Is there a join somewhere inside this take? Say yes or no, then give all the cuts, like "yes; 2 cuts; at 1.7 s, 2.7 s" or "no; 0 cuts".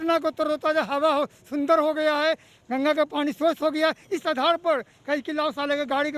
no; 0 cuts